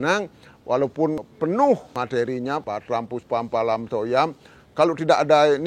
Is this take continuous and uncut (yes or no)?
no